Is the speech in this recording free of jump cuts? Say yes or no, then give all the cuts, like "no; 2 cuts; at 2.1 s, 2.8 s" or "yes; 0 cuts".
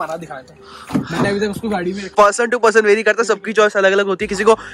no; 1 cut; at 2.1 s